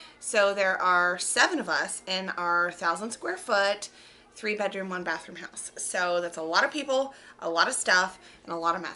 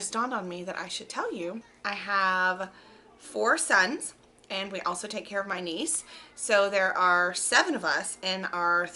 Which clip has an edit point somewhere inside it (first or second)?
second